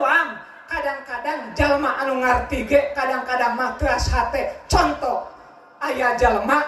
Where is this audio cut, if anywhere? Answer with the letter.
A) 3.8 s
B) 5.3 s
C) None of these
C